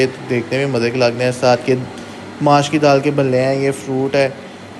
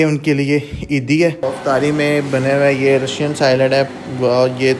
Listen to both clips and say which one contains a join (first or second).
second